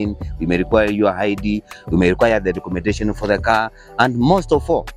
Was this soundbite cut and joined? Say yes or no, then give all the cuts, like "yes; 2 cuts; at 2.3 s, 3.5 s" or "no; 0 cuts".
no; 0 cuts